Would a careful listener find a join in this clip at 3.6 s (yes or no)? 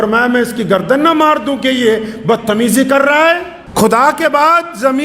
yes